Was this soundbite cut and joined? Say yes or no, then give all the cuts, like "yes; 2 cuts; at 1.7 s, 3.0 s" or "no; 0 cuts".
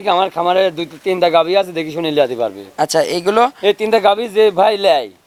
no; 0 cuts